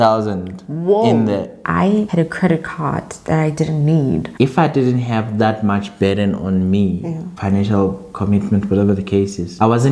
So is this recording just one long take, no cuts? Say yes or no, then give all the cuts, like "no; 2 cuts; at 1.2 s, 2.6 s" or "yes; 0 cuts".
no; 2 cuts; at 1.6 s, 4.3 s